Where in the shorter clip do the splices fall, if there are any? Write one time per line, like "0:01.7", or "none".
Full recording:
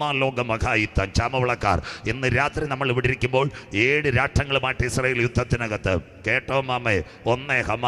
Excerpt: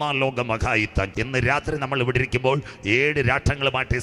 0:01.1